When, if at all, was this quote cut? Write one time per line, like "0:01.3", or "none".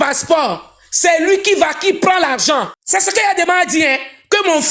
0:02.8